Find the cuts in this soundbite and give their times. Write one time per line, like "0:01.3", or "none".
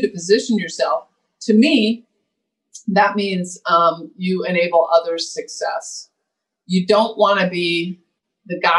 none